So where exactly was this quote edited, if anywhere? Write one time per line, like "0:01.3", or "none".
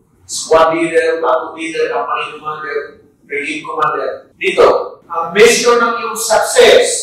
0:04.3

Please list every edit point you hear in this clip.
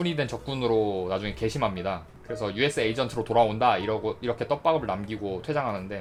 none

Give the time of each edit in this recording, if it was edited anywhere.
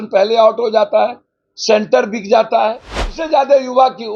0:03.2

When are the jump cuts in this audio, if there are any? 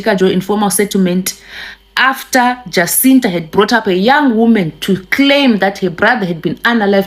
none

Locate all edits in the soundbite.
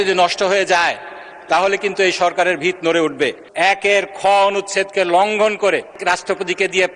0:03.4
0:06.0

